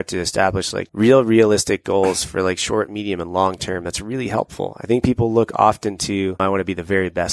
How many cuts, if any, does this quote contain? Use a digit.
2